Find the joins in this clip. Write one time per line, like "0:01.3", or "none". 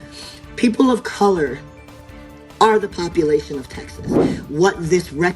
0:04.4

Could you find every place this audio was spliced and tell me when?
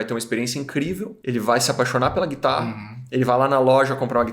0:01.1

